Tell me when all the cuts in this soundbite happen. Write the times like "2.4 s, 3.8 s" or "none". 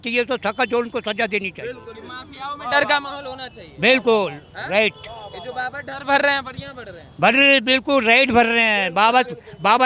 none